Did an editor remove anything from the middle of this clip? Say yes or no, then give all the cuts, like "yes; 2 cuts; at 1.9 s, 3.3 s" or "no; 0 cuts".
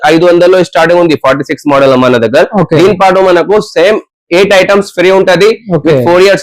no; 0 cuts